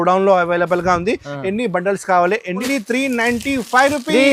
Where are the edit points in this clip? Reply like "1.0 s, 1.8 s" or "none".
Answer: 2.7 s